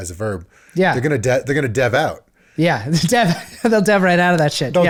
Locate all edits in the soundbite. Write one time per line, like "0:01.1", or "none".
none